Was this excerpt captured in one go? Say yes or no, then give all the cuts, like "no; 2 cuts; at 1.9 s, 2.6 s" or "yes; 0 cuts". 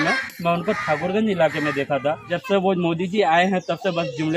no; 1 cut; at 2.3 s